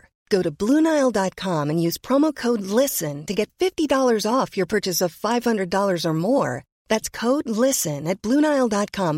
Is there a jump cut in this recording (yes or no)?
no